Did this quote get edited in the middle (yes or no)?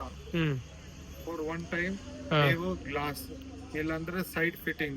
no